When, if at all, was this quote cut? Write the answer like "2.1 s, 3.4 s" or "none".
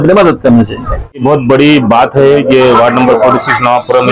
1.2 s